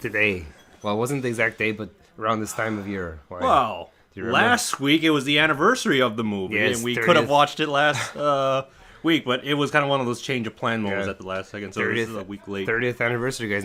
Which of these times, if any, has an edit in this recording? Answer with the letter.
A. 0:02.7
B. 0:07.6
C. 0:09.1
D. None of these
D